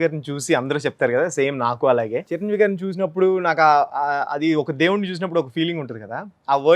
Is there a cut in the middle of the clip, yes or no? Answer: yes